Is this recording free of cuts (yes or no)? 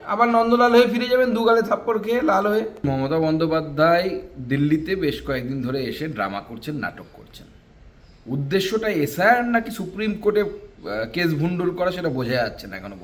no